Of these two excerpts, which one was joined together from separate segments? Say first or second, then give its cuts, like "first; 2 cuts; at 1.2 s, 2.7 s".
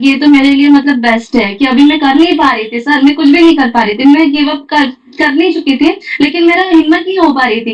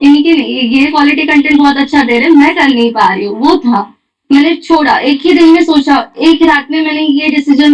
second; 1 cut; at 4.1 s